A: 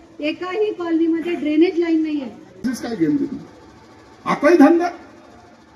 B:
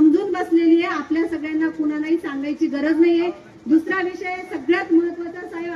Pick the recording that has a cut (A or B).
A